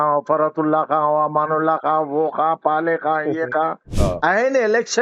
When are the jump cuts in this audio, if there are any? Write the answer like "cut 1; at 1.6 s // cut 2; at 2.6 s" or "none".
cut 1; at 3.9 s